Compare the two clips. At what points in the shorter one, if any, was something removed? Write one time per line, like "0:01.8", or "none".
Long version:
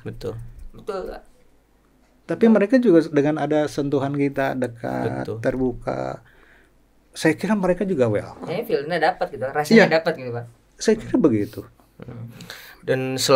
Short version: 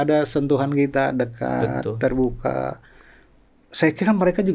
none